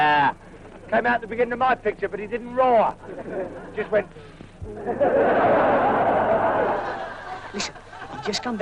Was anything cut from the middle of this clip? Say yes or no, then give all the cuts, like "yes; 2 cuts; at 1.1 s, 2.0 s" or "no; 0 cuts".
yes; 1 cut; at 6.9 s